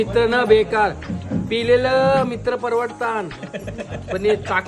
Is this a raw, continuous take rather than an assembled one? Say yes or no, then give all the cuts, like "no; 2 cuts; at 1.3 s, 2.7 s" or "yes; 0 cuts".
yes; 0 cuts